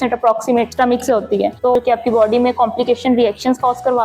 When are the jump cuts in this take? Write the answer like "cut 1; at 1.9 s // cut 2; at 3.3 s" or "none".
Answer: cut 1; at 1.7 s